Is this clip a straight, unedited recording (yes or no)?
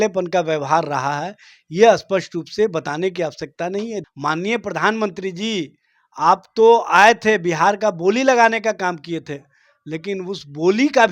no